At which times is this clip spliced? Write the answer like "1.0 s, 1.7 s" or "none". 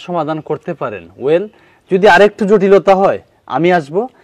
none